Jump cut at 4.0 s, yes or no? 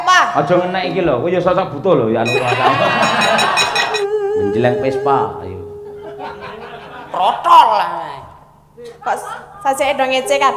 yes